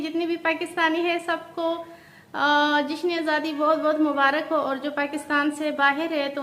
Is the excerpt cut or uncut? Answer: uncut